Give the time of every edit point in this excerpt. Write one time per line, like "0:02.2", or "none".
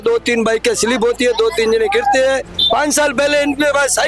0:02.4